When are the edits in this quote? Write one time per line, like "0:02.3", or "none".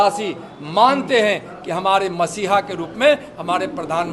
none